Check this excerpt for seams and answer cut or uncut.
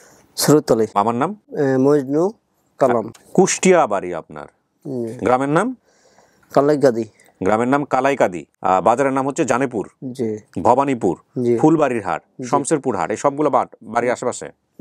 cut